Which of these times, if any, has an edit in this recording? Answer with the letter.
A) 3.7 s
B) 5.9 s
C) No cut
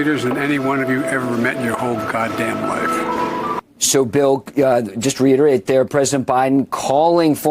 A